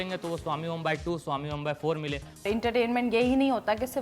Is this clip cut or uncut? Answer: cut